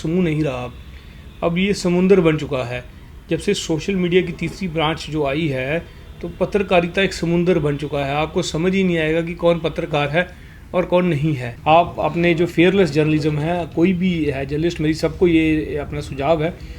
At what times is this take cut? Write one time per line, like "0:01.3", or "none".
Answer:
0:11.5